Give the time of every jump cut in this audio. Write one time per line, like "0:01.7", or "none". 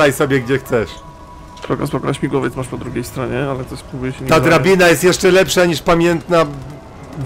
none